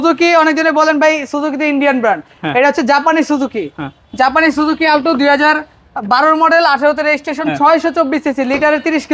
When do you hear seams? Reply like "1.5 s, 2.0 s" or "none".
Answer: none